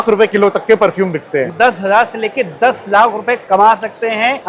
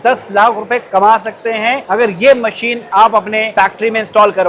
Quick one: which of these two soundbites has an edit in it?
first; 1 cut; at 1.5 s

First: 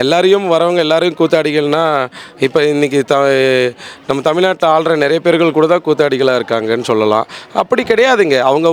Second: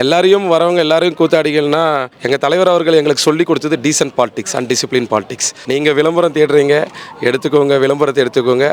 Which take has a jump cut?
second; 2 cuts; at 2.2 s, 5.5 s

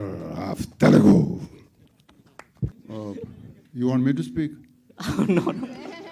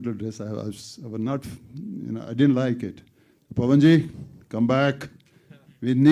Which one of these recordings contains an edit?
first; 1 cut; at 2.8 s

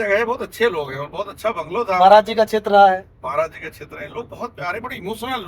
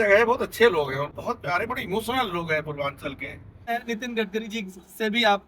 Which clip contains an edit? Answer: second; 2 cuts; at 1.1 s, 3.7 s

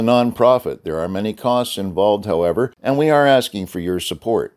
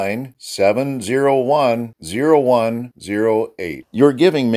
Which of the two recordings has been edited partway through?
first; 1 cut; at 2.8 s

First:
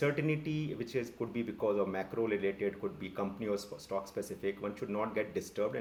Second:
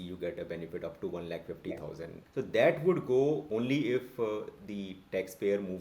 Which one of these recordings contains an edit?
second; 2 cuts; at 2.2 s, 3.4 s

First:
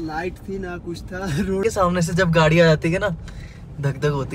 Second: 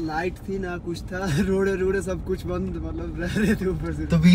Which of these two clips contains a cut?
first; 1 cut; at 1.6 s

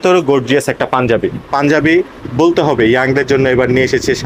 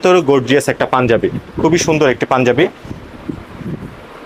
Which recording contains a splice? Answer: first; 1 cut; at 1.4 s

